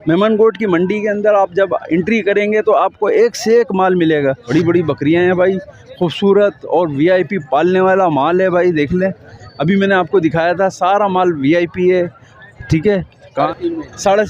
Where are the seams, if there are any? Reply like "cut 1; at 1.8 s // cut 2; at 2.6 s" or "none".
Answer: cut 1; at 4.5 s // cut 2; at 13.5 s